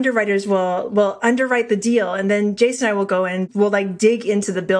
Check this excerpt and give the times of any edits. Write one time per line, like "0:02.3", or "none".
0:03.4